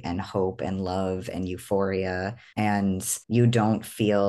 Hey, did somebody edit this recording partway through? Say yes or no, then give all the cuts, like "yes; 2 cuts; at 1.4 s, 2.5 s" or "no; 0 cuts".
yes; 2 cuts; at 2.4 s, 3.1 s